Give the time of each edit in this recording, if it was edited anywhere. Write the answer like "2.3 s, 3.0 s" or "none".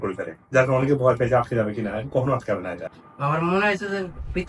2.9 s